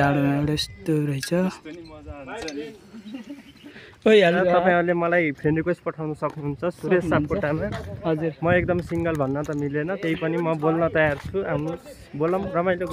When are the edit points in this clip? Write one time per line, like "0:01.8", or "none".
0:04.4